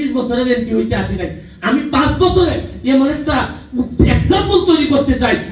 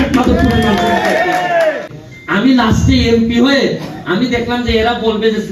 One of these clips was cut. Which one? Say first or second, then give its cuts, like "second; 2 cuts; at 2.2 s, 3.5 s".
second; 1 cut; at 1.9 s